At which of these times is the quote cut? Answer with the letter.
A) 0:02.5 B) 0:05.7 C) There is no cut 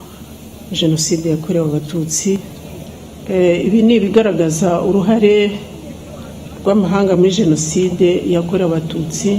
A